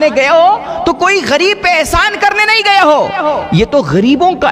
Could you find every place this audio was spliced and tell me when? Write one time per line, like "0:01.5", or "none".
none